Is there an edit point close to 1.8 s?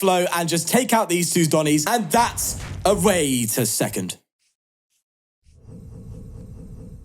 yes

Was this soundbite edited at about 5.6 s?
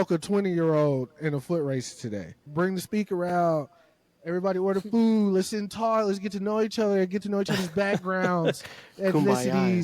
no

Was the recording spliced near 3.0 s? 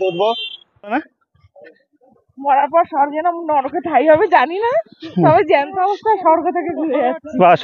no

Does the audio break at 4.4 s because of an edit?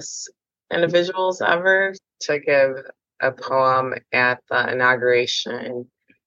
no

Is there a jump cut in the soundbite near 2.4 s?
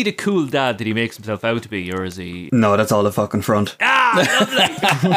yes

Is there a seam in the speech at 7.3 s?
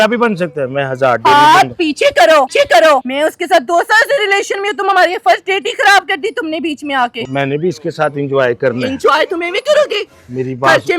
yes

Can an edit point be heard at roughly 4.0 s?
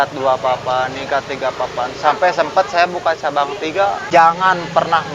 yes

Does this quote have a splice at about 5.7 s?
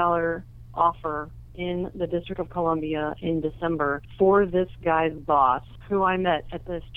yes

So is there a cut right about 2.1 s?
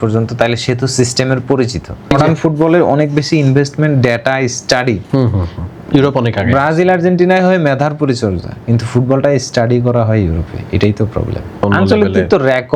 yes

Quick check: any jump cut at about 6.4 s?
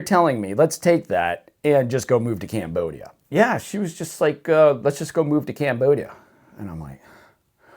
no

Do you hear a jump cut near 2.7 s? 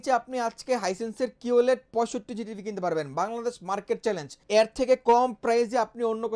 no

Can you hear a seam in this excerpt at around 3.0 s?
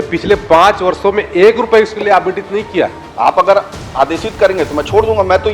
yes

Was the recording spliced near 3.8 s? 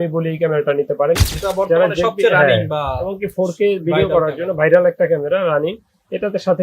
no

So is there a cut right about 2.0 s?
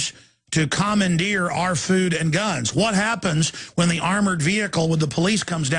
yes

